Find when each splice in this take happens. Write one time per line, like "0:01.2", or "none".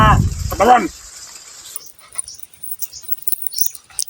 0:01.9